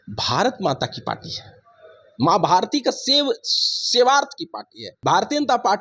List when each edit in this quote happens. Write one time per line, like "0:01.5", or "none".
0:04.9